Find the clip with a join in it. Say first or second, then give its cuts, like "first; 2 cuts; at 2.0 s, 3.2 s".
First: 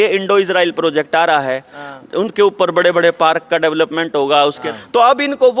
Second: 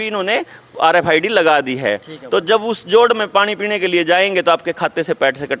first; 1 cut; at 4.7 s